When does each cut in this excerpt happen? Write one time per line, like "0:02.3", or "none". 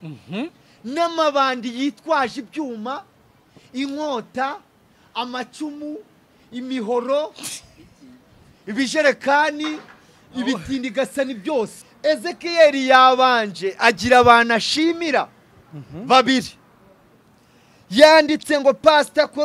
0:11.8